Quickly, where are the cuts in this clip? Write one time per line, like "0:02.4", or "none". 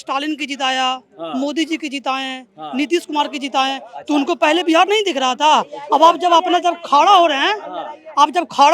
none

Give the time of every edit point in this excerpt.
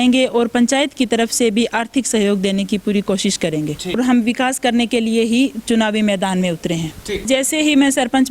0:04.0
0:07.3

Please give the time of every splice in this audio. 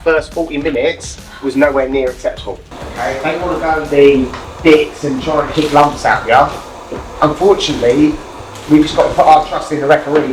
0:02.7
0:04.4

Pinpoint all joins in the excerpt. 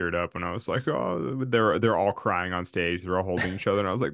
none

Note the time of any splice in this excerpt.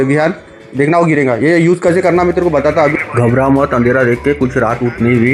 0:02.9

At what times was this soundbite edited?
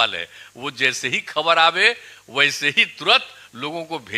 none

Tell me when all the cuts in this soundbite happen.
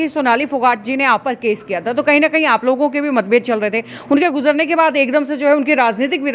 none

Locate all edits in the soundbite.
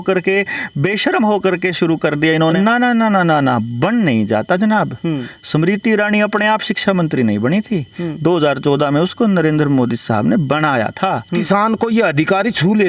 0:02.5
0:11.4

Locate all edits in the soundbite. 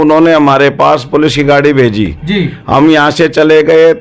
none

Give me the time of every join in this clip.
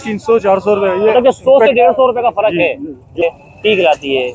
0:03.2

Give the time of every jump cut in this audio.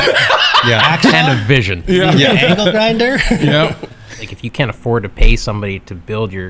0:01.1
0:04.2

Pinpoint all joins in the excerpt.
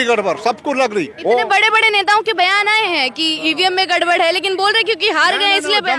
none

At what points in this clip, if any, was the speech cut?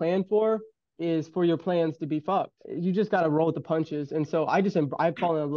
0:02.6

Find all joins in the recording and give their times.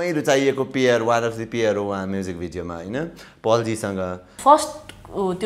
0:04.3

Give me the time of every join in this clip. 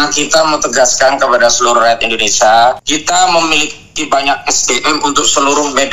0:02.9

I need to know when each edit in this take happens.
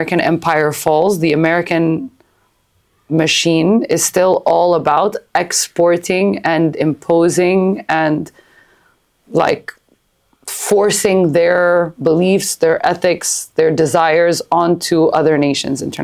none

